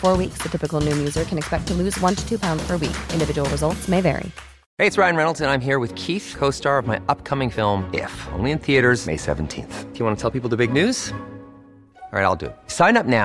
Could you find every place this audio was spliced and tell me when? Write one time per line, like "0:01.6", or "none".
0:04.7